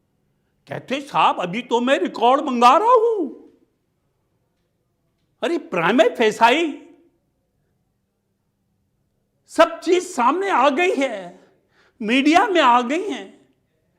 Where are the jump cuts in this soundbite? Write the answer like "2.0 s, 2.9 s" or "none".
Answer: none